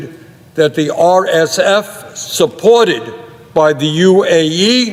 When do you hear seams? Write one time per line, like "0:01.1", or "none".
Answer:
none